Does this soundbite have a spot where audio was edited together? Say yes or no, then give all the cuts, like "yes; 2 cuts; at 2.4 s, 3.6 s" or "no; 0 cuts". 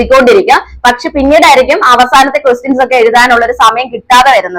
no; 0 cuts